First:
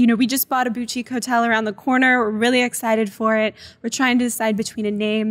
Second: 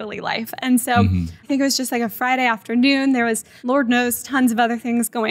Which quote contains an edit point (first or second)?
second